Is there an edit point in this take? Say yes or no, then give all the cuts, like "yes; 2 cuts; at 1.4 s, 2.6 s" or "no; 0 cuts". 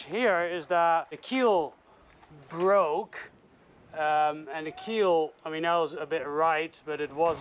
yes; 1 cut; at 1.2 s